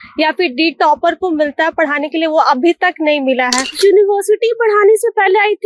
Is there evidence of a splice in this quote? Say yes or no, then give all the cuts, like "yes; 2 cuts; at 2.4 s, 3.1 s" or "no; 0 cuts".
yes; 1 cut; at 3.7 s